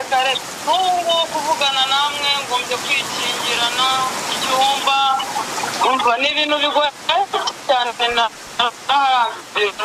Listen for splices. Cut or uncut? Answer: uncut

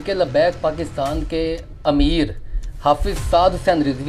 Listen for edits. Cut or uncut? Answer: cut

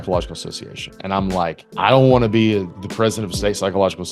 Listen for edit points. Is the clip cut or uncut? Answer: cut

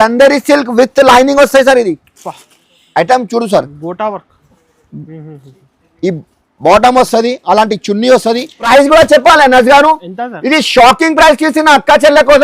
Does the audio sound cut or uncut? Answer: cut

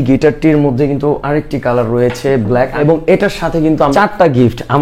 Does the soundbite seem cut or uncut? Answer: cut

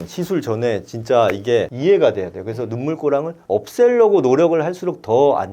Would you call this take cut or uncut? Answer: cut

